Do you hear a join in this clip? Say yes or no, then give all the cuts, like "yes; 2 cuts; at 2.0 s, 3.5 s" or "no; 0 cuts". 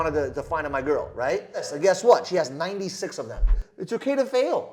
yes; 2 cuts; at 1.7 s, 3.6 s